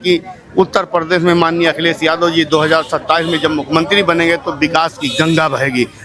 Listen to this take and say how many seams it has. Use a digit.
0